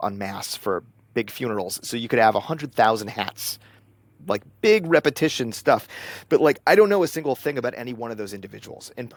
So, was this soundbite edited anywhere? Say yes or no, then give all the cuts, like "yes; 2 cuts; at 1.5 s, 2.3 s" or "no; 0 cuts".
no; 0 cuts